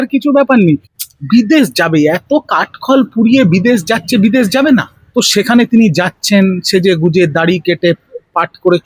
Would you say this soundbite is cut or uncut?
cut